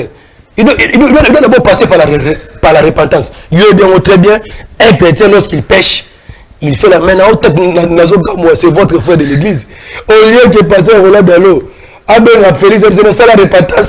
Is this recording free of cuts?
yes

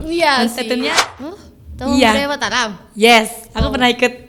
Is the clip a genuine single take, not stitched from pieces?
no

